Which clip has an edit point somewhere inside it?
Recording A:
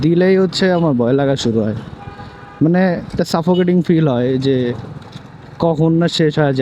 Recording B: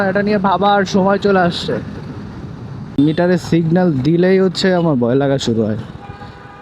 B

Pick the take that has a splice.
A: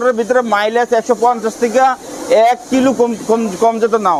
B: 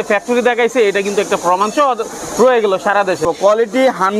B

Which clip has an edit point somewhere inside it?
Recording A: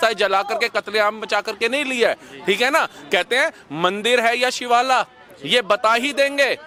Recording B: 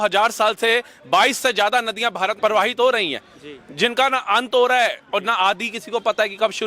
B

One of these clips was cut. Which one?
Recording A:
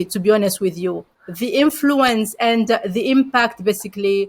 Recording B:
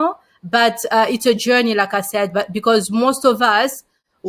A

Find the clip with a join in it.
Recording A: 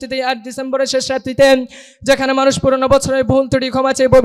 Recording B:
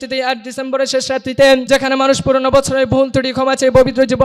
B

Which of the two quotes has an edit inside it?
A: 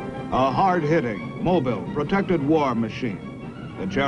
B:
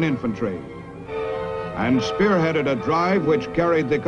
A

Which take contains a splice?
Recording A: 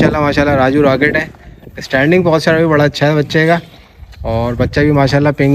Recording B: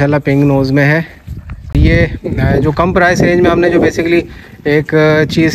B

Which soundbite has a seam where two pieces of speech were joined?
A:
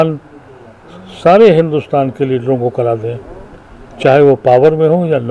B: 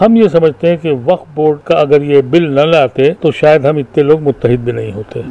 B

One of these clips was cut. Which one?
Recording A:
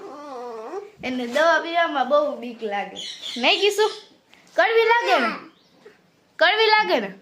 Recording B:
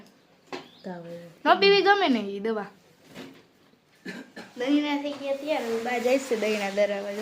B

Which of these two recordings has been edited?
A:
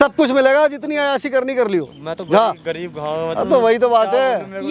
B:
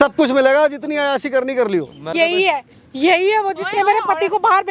B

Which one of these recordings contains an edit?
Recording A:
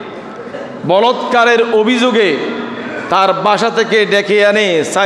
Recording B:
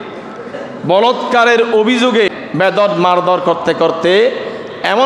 B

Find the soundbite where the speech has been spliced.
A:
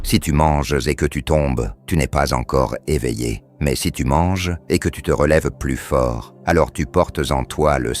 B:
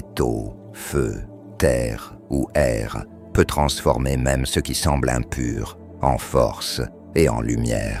A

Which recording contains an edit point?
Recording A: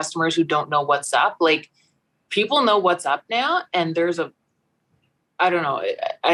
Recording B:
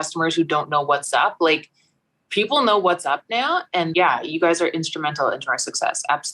B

